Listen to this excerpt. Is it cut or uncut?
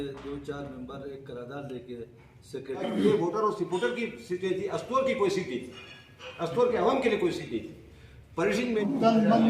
cut